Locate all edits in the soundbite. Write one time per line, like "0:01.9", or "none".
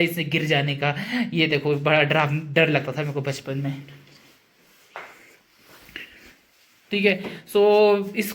none